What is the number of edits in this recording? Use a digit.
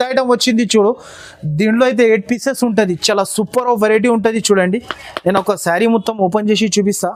0